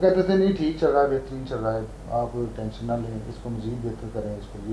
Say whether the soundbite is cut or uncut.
uncut